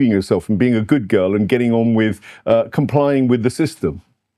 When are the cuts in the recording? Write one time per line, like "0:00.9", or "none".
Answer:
none